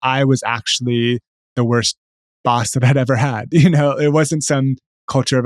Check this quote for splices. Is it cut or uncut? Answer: uncut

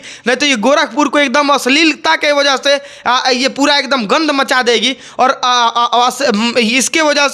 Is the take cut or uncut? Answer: uncut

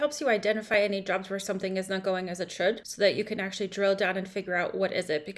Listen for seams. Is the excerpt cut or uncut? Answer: cut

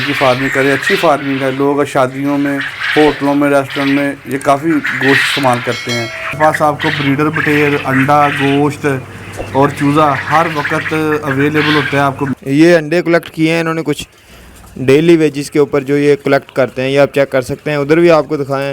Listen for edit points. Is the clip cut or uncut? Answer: cut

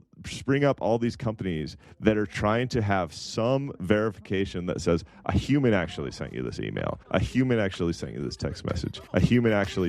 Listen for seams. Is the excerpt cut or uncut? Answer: cut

